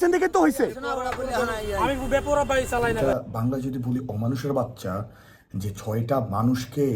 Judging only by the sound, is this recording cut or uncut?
cut